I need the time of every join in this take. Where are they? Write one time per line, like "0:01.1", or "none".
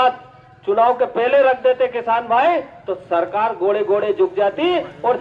none